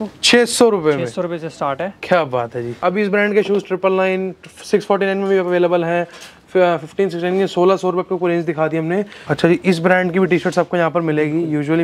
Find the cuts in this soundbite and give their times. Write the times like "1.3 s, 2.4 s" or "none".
2.7 s, 9.2 s